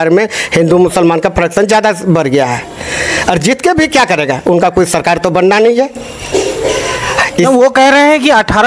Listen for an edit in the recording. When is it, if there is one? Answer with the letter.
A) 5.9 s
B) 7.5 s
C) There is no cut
C